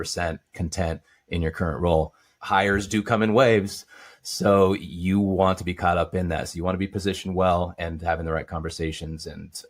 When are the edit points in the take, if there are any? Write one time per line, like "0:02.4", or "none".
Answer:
0:02.3